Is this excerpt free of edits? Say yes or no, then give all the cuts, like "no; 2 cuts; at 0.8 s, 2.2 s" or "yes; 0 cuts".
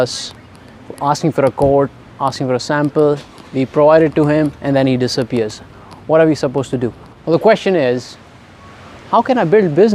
no; 1 cut; at 7.1 s